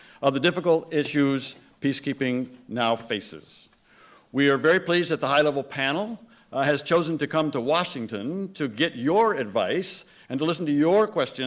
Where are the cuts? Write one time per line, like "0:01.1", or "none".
none